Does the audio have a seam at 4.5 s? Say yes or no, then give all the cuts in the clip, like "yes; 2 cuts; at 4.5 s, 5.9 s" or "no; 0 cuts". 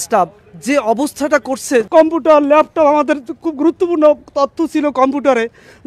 no; 1 cut; at 1.9 s